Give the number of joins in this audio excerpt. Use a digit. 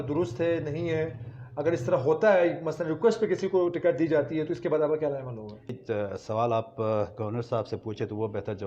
1